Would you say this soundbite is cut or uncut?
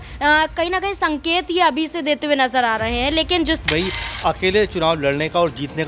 cut